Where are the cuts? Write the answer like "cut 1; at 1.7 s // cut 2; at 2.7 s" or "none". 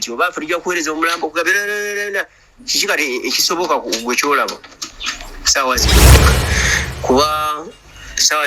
cut 1; at 6.3 s